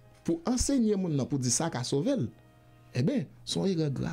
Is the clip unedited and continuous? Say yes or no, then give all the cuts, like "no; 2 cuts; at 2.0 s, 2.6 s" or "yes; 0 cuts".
yes; 0 cuts